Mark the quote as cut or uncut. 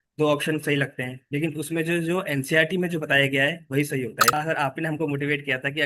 cut